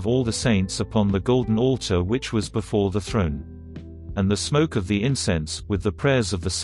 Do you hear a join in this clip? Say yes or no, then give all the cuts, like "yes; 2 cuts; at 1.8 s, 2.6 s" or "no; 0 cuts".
yes; 1 cut; at 4.0 s